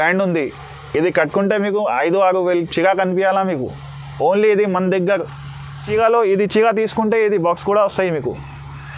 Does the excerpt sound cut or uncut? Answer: cut